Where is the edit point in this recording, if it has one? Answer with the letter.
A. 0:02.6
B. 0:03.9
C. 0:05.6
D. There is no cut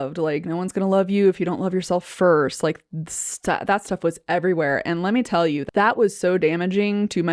C